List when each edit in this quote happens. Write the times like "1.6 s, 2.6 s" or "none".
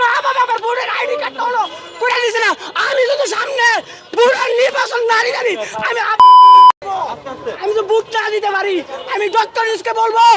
none